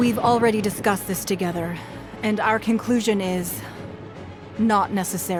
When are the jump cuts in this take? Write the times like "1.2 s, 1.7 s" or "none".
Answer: none